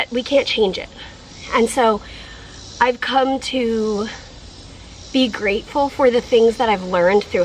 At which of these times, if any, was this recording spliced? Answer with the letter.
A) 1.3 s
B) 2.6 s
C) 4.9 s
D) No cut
D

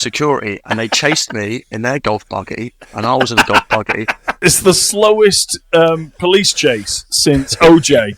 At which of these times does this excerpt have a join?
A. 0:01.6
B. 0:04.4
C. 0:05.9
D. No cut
B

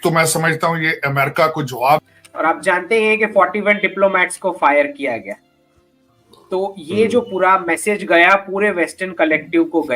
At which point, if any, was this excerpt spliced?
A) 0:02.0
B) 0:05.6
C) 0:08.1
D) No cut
A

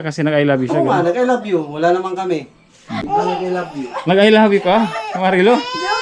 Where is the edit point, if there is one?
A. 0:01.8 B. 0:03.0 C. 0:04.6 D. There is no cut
B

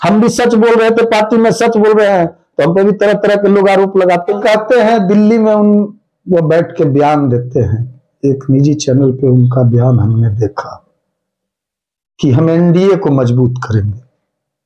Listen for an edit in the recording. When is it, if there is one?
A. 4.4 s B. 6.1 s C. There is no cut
A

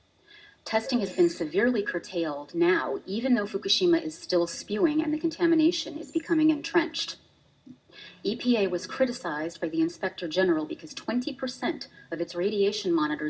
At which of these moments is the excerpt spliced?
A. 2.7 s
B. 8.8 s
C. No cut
A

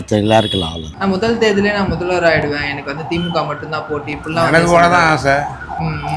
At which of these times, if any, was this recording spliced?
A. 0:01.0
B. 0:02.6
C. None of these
A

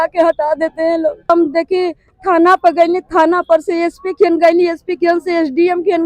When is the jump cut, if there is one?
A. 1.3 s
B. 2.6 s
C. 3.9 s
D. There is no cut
A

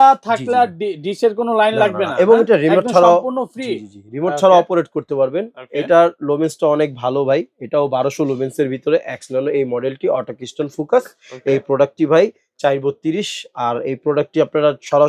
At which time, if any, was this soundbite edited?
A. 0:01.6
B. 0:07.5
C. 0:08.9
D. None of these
D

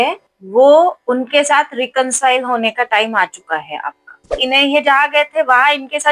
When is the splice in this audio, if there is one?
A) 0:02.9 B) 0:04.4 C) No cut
B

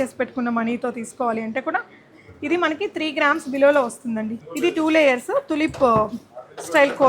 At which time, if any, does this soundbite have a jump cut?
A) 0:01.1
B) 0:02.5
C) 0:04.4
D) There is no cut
C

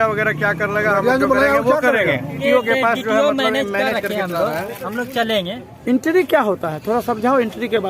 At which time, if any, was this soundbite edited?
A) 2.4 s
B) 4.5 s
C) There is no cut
A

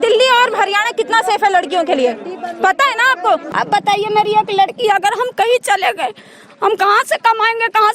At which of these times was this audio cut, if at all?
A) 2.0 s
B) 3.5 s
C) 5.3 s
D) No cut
B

